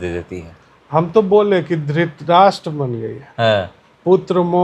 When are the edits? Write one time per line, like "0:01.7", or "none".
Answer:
none